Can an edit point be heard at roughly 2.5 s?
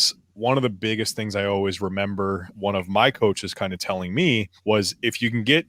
yes; 2 cuts; at 2.5 s, 4.5 s

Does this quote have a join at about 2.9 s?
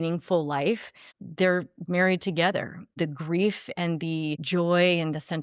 yes; 3 cuts; at 0.9 s, 2.9 s, 4.4 s

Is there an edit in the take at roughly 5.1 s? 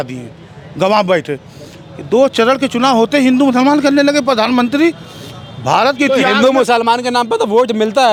no; 0 cuts

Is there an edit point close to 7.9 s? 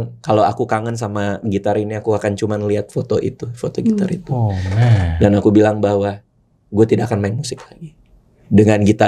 no; 0 cuts

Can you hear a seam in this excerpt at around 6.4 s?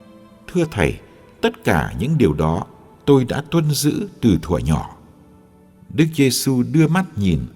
yes; 1 cut; at 6.4 s

